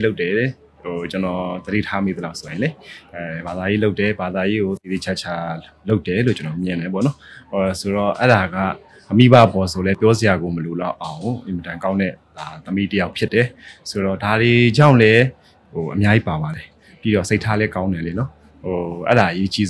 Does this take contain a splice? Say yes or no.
no